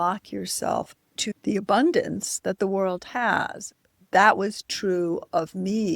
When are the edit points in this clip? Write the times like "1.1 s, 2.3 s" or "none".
1.3 s, 3.8 s